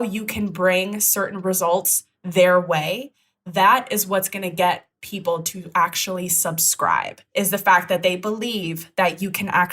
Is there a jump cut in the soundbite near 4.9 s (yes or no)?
no